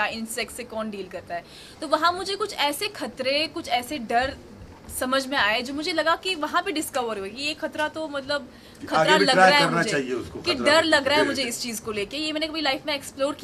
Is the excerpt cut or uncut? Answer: uncut